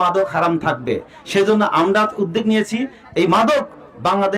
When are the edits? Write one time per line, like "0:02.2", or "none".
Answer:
0:01.1